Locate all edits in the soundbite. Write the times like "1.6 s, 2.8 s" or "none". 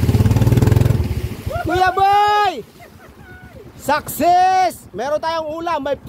none